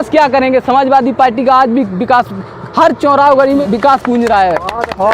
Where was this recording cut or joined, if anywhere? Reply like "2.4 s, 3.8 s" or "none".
3.6 s